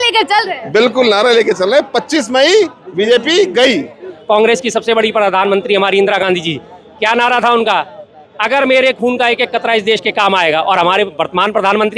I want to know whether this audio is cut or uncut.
cut